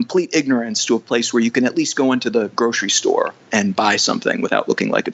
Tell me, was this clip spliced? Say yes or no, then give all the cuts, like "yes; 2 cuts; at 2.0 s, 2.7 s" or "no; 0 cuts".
no; 0 cuts